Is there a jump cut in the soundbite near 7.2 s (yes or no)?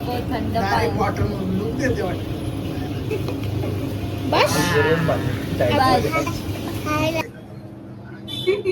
yes